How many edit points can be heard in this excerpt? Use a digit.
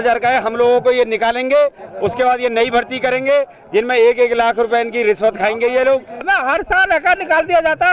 1